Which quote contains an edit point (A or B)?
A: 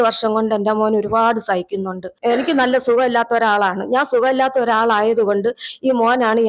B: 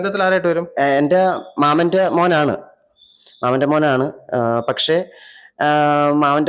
A